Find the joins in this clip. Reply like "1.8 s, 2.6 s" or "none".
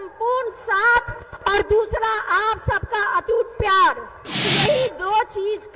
4.5 s